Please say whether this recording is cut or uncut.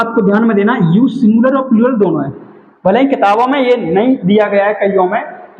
uncut